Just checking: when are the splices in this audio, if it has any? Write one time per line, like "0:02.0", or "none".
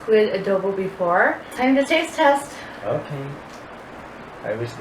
0:01.5
0:03.8